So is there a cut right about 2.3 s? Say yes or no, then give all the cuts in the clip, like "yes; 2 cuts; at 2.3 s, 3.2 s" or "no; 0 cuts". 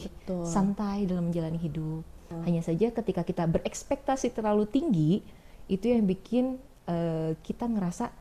yes; 1 cut; at 2.3 s